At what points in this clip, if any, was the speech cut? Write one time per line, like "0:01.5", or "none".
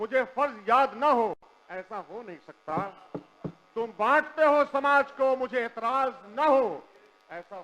none